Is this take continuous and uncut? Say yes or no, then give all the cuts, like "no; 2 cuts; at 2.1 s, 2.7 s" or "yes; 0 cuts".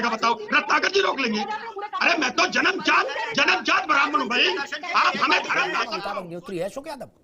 no; 1 cut; at 5.9 s